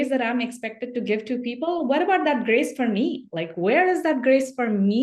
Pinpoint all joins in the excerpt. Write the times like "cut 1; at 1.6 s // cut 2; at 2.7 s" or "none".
none